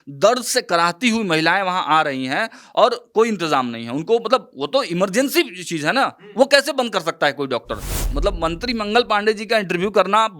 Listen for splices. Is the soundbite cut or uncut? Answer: cut